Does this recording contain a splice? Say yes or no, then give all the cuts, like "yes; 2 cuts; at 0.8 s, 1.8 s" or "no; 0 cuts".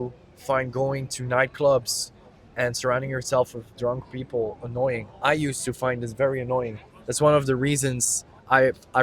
no; 0 cuts